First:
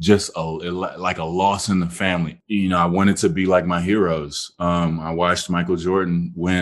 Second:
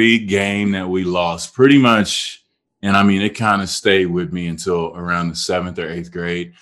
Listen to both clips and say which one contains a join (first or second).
first